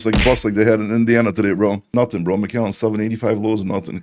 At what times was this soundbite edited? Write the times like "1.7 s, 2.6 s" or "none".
1.9 s